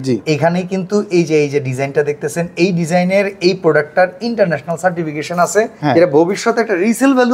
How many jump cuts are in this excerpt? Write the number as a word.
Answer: one